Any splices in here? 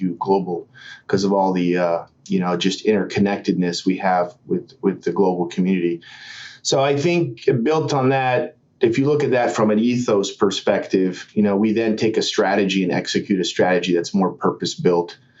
no; 0 cuts

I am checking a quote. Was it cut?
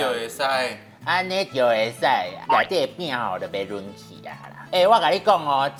no; 0 cuts

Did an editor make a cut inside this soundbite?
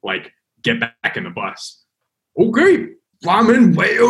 yes; 2 cuts; at 1.8 s, 3.1 s

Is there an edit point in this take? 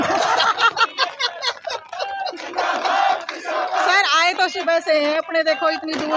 no; 0 cuts

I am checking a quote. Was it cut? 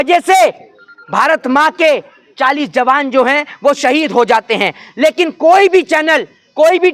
no; 0 cuts

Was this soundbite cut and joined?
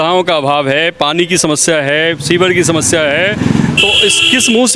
no; 0 cuts

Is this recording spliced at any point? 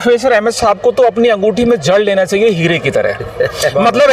no; 0 cuts

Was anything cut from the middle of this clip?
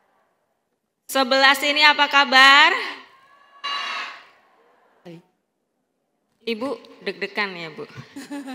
yes; 1 cut; at 5.0 s

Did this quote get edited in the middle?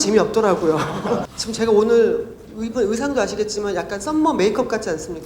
yes; 1 cut; at 1.3 s

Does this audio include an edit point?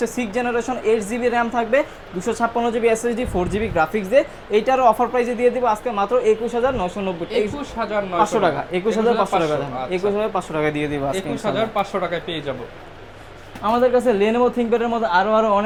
no; 0 cuts

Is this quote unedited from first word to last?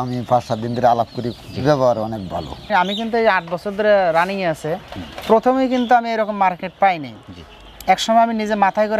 no; 1 cut; at 2.6 s

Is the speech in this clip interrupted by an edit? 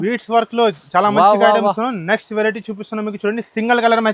no; 0 cuts

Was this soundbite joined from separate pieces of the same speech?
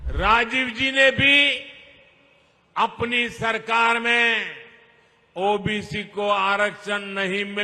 no; 0 cuts

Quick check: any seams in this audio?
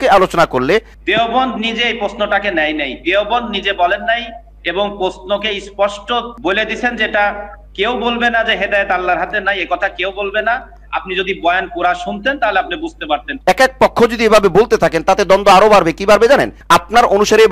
yes; 3 cuts; at 0.9 s, 6.3 s, 13.3 s

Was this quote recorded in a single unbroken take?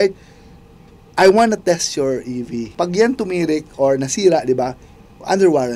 no; 1 cut; at 2.7 s

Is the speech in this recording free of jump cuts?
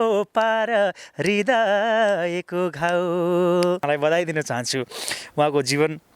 no; 1 cut; at 3.8 s

